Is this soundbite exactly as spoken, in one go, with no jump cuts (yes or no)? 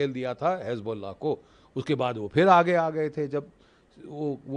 yes